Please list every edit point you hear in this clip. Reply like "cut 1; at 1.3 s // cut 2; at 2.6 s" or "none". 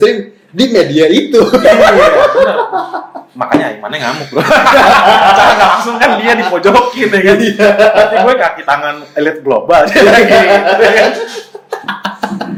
none

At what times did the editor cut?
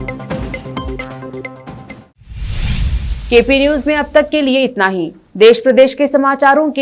none

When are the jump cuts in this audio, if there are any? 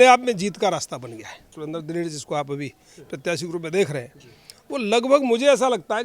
cut 1; at 1.5 s

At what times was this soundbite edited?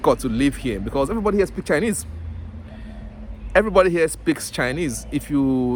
none

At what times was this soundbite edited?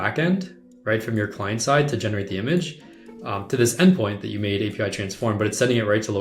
none

